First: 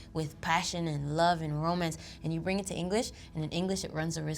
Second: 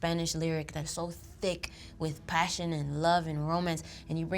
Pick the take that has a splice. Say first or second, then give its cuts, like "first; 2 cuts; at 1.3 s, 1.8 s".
second; 1 cut; at 0.9 s